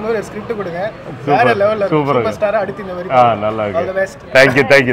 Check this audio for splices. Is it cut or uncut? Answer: uncut